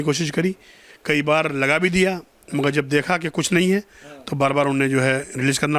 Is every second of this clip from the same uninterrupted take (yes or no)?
yes